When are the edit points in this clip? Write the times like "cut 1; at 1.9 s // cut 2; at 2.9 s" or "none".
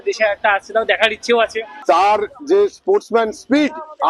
cut 1; at 1.7 s